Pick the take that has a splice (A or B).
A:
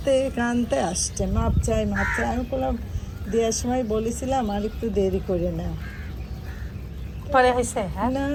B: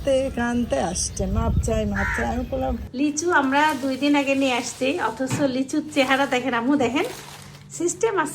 B